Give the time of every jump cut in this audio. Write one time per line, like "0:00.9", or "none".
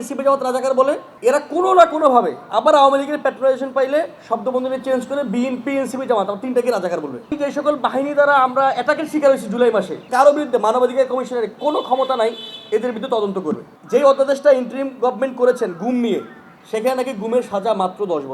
0:01.1
0:07.3
0:10.0
0:13.7